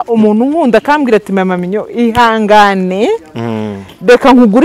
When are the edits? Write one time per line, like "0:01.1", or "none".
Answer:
none